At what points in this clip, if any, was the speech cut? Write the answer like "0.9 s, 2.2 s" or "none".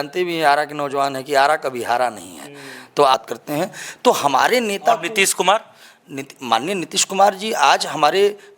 3.1 s